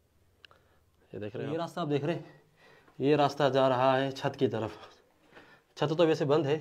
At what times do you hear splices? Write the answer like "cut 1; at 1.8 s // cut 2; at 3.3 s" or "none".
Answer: cut 1; at 1.4 s